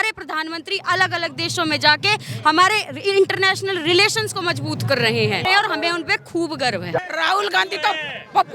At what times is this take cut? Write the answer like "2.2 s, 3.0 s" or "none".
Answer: 5.4 s, 7.0 s